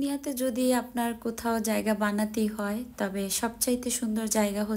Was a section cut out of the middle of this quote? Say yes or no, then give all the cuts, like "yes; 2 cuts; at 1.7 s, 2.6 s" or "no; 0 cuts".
no; 0 cuts